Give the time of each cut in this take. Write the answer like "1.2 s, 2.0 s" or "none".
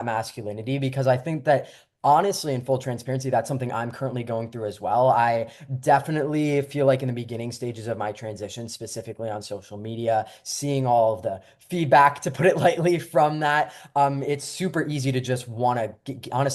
none